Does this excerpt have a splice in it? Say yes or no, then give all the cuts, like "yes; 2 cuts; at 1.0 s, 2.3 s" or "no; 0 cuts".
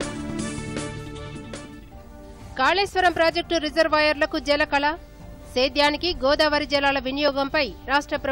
yes; 1 cut; at 2.0 s